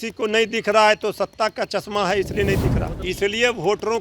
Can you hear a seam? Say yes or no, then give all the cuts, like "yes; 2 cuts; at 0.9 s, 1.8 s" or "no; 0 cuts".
yes; 1 cut; at 2.9 s